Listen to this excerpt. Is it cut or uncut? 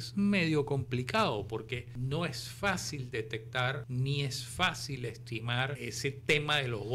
cut